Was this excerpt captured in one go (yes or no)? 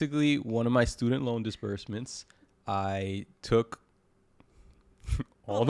yes